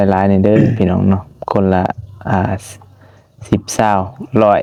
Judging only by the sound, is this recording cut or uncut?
uncut